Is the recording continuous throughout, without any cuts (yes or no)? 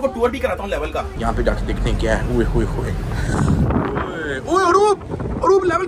no